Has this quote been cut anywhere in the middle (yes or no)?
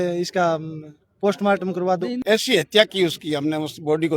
yes